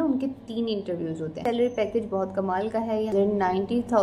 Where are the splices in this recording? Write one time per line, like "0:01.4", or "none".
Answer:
0:01.4
0:03.1